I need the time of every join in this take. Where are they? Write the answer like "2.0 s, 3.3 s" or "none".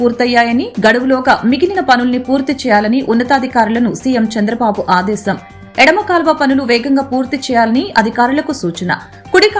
none